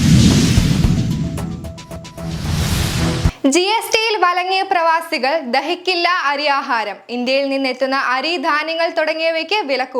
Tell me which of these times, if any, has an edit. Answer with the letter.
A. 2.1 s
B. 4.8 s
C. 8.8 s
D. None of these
A